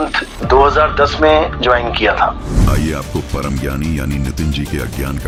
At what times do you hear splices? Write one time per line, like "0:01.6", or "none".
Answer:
none